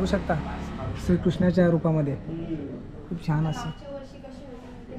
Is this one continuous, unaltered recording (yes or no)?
yes